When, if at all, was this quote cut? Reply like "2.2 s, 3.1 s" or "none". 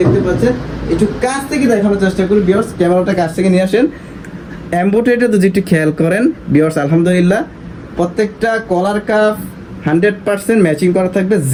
none